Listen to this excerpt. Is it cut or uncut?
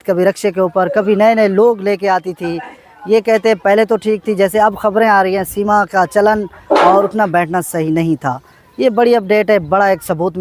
uncut